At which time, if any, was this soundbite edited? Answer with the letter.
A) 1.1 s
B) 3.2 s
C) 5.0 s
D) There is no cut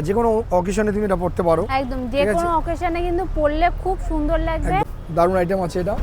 C